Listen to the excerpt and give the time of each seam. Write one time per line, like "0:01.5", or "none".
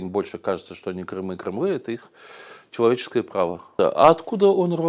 0:03.7